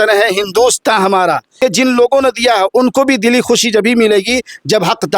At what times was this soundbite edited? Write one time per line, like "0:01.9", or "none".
0:01.6